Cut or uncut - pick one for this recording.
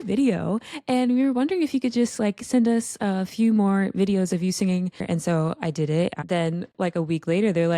cut